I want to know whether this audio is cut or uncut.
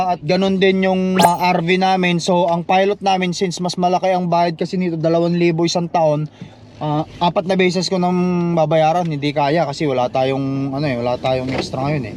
cut